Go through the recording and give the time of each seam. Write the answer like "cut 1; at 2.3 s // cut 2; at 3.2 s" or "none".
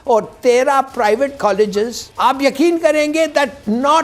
cut 1; at 2.0 s